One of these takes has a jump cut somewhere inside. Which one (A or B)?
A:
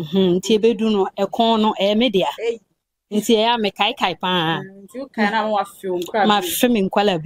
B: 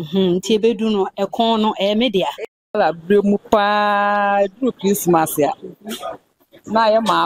B